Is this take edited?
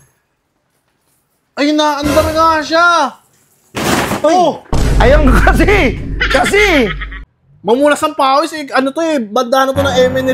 yes; 1 cut; at 7.1 s

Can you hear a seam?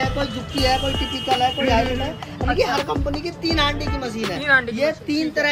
no; 0 cuts

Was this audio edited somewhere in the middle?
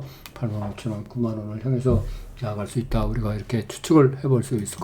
no; 0 cuts

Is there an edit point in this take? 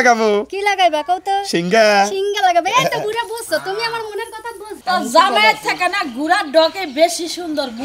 yes; 1 cut; at 4.7 s

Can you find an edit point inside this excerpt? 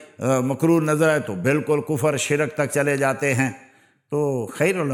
no; 0 cuts

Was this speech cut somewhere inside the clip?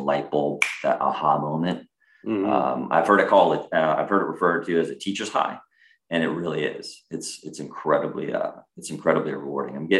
no; 0 cuts

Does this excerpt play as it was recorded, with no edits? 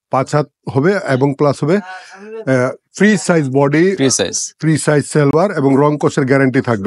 yes; 0 cuts

